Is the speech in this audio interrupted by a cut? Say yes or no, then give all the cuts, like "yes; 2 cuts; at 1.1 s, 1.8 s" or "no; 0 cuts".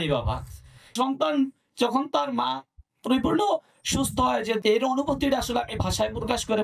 yes; 2 cuts; at 0.9 s, 4.6 s